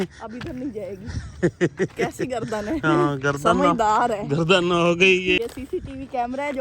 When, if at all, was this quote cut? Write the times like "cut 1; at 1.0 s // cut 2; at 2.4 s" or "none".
cut 1; at 5.4 s